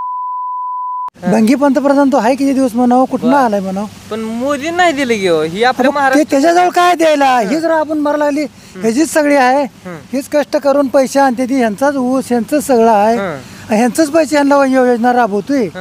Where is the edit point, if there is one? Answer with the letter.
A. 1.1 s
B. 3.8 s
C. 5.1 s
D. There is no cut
A